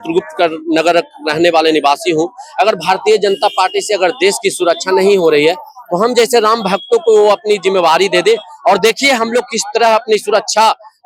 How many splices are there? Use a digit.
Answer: 0